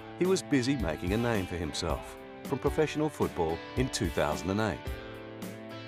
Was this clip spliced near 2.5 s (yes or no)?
no